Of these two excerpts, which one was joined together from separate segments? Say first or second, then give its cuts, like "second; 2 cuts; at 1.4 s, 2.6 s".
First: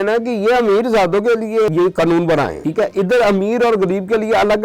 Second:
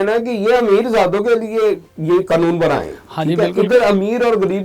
first; 2 cuts; at 1.7 s, 2.6 s